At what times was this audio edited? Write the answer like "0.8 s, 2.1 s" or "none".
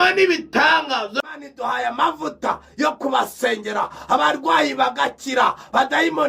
1.2 s